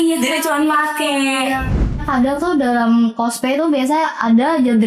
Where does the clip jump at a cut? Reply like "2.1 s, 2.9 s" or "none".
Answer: 2.0 s